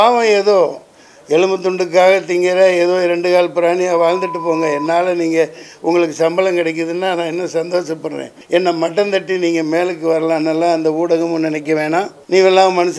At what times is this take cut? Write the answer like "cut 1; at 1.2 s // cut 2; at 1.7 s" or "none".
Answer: cut 1; at 8.3 s // cut 2; at 12.2 s